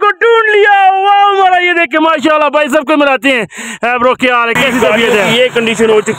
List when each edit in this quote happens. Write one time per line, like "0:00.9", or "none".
0:05.3